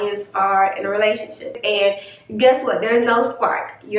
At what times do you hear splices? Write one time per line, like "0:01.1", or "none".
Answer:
0:01.6